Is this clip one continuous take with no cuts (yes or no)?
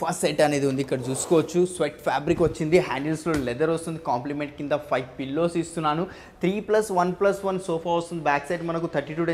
yes